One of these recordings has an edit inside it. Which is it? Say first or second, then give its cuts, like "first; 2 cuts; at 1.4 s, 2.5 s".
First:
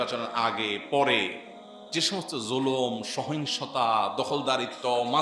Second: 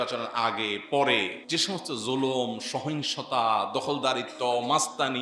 second; 1 cut; at 1.4 s